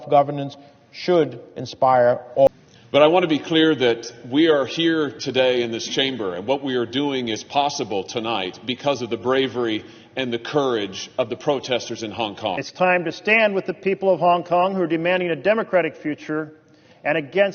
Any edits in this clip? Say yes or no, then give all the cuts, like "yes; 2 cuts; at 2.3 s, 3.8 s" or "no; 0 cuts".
yes; 2 cuts; at 2.5 s, 12.6 s